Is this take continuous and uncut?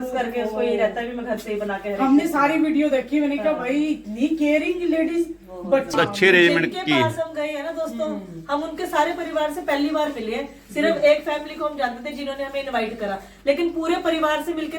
no; 1 cut; at 5.9 s

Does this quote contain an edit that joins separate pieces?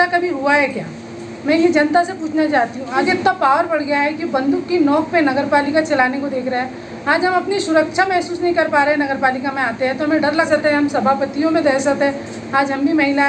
yes; 2 cuts; at 3.0 s, 10.5 s

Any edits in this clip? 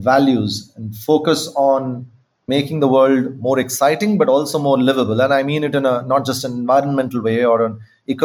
no; 0 cuts

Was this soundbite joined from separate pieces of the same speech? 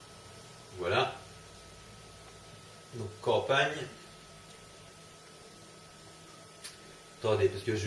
yes; 1 cut; at 4.6 s

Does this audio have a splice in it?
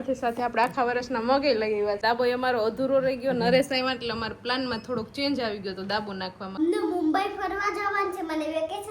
yes; 2 cuts; at 2.0 s, 6.4 s

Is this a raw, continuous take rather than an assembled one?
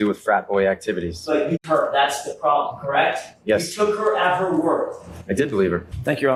yes; 0 cuts

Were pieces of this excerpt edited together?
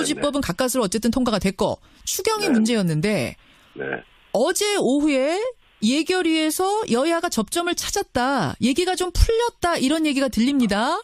yes; 1 cut; at 7.8 s

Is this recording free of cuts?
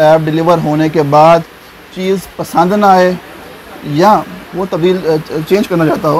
yes; 0 cuts

